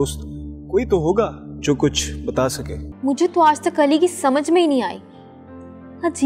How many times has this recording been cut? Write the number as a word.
one